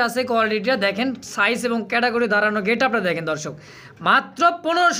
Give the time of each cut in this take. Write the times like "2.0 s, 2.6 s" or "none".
none